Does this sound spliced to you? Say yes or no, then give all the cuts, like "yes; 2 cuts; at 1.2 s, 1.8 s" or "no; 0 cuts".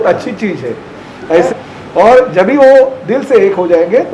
yes; 1 cut; at 1.5 s